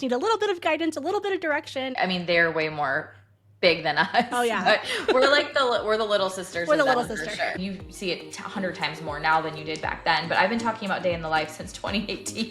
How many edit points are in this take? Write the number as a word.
two